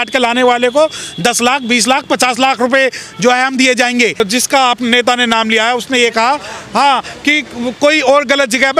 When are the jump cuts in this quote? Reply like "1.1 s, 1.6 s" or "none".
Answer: 4.2 s